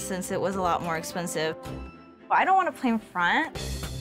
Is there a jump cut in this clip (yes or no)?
no